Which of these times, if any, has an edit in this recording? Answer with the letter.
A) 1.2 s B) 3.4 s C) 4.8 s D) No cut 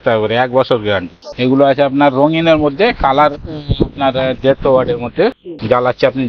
A